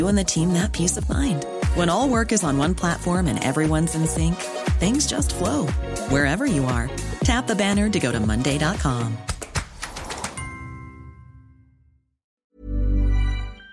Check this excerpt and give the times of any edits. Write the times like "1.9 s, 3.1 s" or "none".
12.4 s